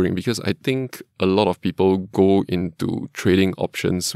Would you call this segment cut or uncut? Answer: uncut